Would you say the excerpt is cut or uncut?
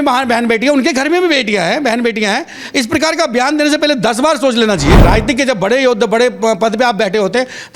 cut